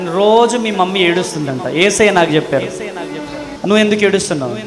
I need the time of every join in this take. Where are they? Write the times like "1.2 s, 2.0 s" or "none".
3.4 s